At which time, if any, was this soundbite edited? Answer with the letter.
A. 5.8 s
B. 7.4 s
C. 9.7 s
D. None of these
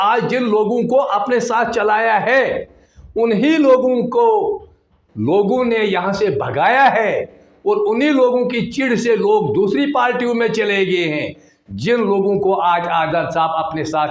D